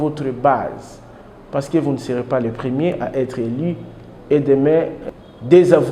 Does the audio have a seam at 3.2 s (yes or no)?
no